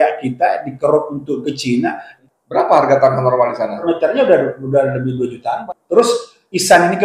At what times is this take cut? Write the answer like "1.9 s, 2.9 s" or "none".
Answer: 2.1 s, 3.8 s, 5.6 s